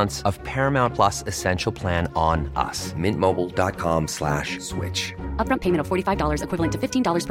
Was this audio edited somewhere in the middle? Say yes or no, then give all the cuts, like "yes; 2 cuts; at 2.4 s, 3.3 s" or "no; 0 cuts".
no; 0 cuts